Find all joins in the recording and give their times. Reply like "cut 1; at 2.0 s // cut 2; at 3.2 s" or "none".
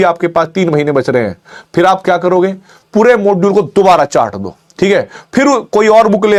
none

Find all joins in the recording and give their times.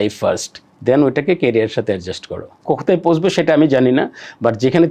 cut 1; at 2.6 s

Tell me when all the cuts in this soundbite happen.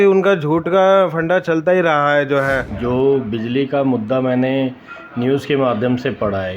cut 1; at 2.7 s

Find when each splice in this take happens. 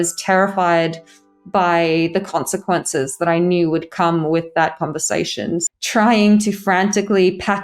cut 1; at 5.6 s

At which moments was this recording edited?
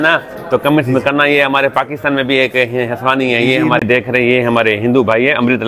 cut 1; at 3.8 s

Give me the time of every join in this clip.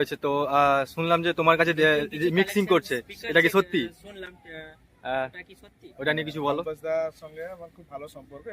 cut 1; at 2.2 s

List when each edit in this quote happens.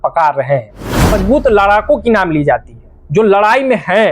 cut 1; at 1.2 s

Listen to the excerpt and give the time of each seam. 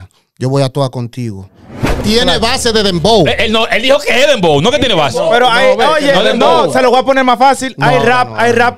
cut 1; at 2.0 s

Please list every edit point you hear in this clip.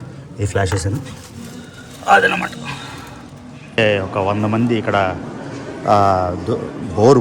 cut 1; at 3.8 s

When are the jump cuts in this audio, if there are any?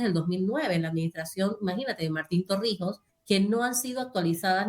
cut 1; at 3.1 s

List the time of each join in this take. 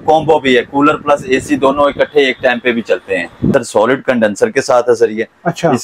cut 1; at 3.5 s

